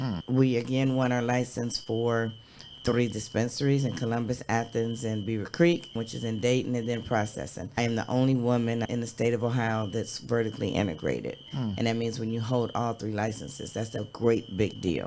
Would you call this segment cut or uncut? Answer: uncut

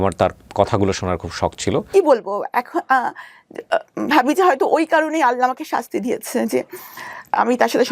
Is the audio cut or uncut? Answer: cut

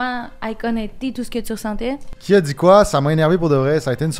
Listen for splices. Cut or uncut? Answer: cut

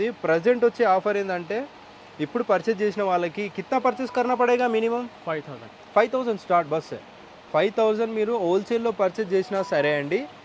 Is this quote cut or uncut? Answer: uncut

